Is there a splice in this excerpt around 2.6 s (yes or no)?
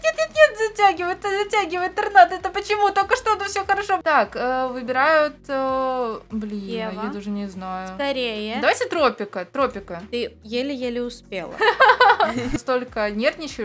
no